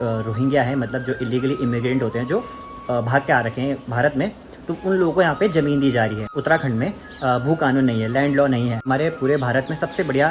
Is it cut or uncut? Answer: cut